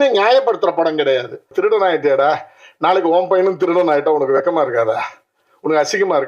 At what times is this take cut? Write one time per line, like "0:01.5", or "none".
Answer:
0:01.5